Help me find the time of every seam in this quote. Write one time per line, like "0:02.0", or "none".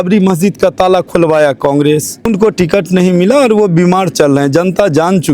0:02.3

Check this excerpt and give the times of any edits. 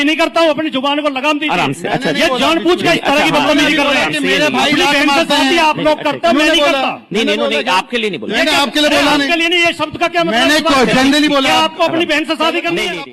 none

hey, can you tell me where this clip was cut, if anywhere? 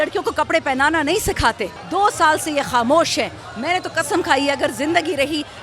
0:01.8

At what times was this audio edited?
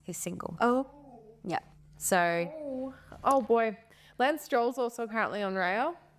none

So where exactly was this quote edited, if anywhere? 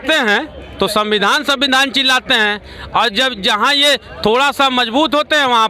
none

